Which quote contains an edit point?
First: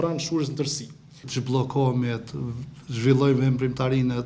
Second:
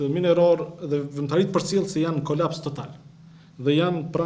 first; 1 cut; at 1.2 s

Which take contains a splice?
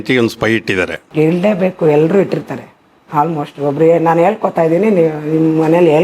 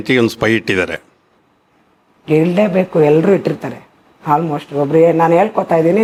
first; 1 cut; at 1.0 s

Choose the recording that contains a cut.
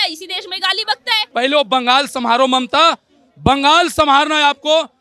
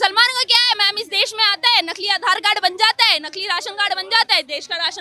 first; 1 cut; at 1.2 s

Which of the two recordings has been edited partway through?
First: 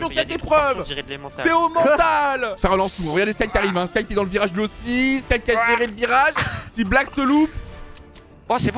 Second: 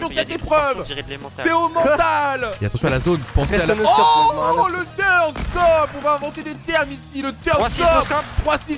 second; 1 cut; at 2.5 s

